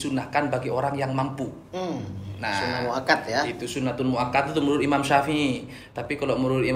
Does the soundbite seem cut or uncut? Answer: uncut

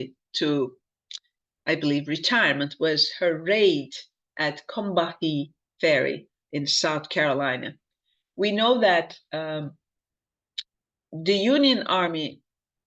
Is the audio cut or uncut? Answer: cut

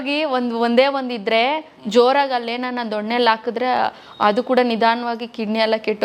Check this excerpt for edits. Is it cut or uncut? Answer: uncut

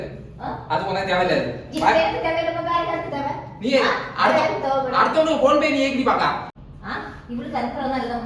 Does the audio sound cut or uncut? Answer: cut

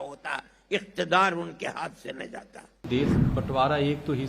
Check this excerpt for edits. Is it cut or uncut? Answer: cut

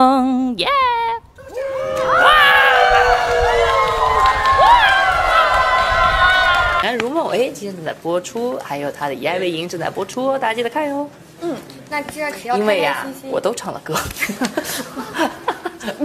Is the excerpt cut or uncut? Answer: cut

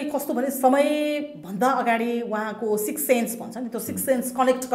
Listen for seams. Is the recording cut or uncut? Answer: uncut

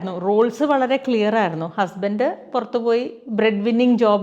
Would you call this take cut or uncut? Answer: uncut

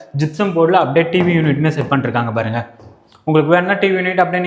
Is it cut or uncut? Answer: uncut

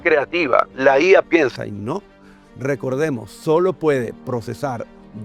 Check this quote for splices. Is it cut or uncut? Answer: uncut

